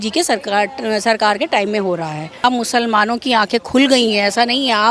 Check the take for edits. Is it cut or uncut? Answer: cut